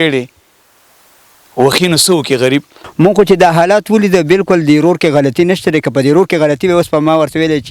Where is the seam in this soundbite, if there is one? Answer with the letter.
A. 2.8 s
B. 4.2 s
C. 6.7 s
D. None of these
A